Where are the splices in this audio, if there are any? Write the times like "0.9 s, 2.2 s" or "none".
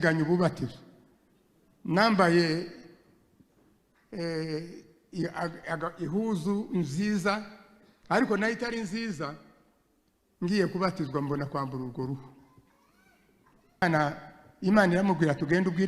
13.8 s